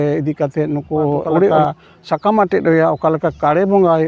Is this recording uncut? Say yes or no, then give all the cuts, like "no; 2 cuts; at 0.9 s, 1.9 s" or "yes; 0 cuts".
no; 1 cut; at 1.5 s